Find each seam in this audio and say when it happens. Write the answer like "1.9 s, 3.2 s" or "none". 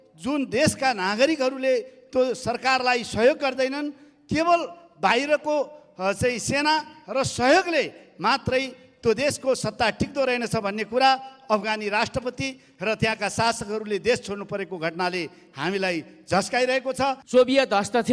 17.2 s